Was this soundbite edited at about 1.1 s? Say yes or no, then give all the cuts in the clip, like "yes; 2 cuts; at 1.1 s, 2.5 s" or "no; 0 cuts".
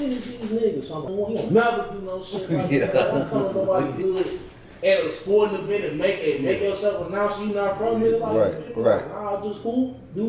yes; 1 cut; at 1.1 s